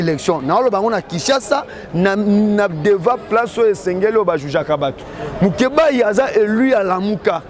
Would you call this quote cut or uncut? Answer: uncut